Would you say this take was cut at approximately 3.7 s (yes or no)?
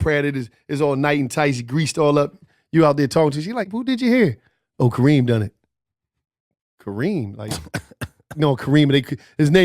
yes